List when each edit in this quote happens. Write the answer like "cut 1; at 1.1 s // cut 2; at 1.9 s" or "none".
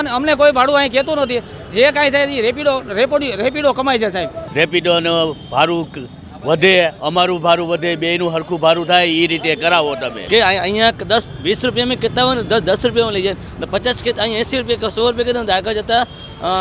cut 1; at 4.4 s // cut 2; at 10.1 s